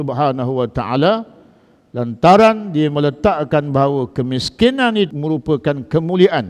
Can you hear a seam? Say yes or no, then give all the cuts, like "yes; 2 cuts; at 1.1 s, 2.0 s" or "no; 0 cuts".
yes; 1 cut; at 5.1 s